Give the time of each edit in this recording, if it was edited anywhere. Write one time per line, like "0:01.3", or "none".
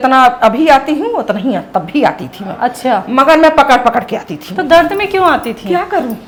none